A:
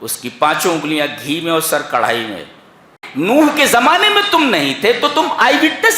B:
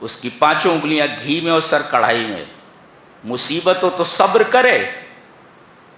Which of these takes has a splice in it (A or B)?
A